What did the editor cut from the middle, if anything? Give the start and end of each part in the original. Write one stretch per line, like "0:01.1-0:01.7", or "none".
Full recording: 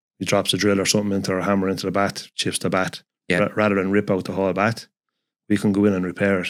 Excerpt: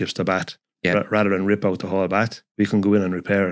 0:04.9-0:05.3